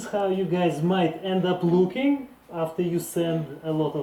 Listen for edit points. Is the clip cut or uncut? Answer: uncut